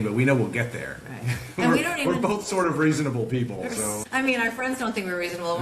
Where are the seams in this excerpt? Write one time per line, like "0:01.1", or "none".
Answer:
0:04.0